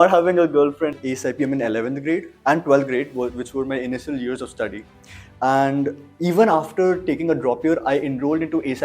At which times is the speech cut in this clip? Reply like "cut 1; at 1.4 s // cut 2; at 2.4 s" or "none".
cut 1; at 0.9 s